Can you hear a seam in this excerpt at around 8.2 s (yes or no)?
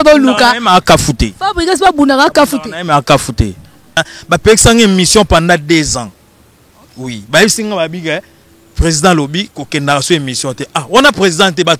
no